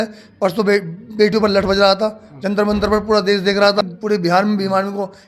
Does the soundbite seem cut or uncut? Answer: cut